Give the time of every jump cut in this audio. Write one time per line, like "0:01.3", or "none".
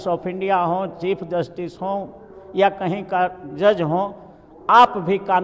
none

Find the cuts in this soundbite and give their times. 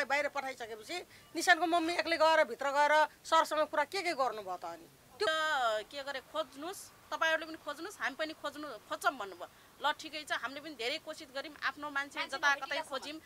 0:05.3

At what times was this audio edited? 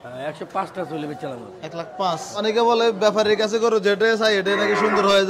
0:02.4

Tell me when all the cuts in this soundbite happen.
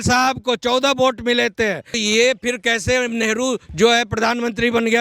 0:02.0

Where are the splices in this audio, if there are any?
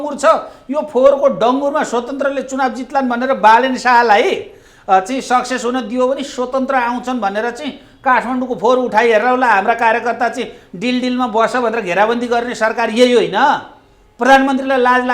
none

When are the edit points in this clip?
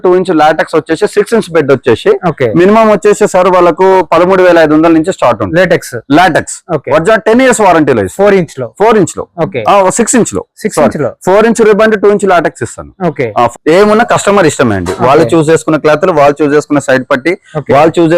0:13.5

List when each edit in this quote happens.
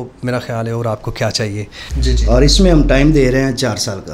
0:01.9

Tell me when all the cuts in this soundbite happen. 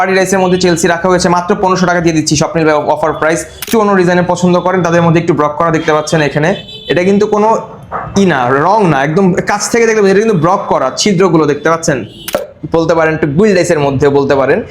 0:03.6
0:12.4

